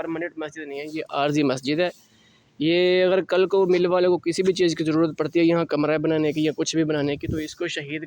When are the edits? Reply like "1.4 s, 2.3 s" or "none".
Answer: none